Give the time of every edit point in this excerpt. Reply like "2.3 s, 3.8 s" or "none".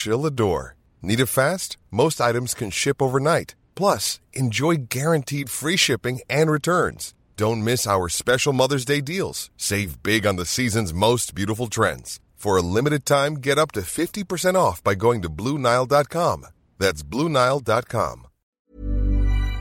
18.6 s